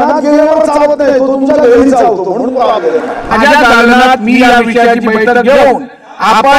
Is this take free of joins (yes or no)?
no